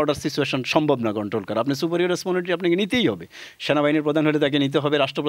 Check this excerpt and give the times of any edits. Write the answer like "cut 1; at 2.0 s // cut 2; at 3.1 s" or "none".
none